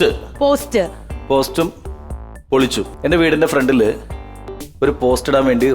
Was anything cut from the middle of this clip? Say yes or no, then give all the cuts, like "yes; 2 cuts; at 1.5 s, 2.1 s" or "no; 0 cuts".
yes; 1 cut; at 2.9 s